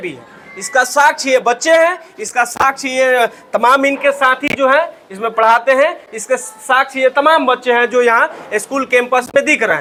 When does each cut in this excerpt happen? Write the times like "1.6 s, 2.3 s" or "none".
none